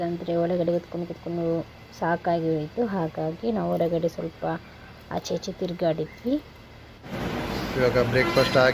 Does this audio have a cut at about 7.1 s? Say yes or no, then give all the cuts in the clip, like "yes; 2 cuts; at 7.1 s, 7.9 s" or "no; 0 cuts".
yes; 1 cut; at 7.1 s